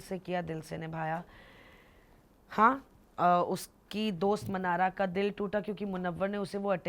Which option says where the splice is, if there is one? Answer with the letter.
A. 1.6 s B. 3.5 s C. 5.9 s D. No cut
D